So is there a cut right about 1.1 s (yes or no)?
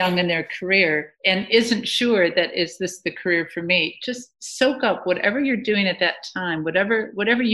yes